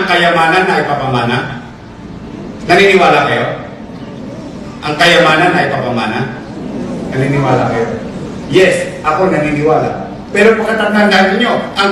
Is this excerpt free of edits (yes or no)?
yes